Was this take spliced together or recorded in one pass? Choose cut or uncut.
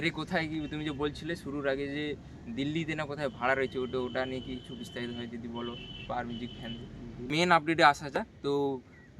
cut